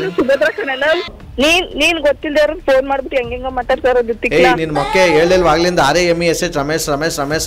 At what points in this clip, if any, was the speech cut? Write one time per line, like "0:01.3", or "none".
0:01.1